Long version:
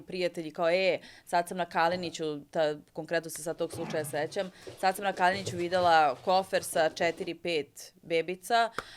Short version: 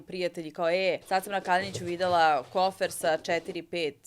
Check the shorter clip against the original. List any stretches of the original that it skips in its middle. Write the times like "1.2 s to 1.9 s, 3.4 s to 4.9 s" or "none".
1.0 s to 4.7 s